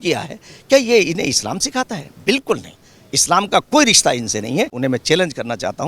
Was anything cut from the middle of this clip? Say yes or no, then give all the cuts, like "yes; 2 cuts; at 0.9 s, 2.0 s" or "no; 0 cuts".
yes; 1 cut; at 4.7 s